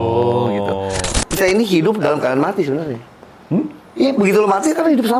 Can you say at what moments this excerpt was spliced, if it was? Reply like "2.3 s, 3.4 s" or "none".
1.4 s